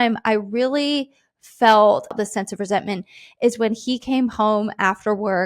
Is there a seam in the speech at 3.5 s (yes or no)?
no